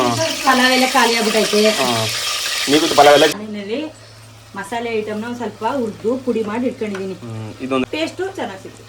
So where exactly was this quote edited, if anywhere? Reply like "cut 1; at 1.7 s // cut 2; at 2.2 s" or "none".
cut 1; at 3.3 s // cut 2; at 7.8 s